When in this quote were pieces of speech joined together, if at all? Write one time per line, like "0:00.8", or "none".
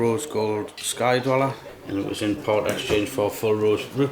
0:01.7